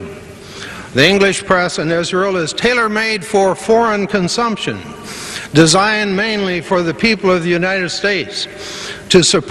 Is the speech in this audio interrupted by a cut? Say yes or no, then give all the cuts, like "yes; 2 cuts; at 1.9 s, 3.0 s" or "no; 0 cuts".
no; 0 cuts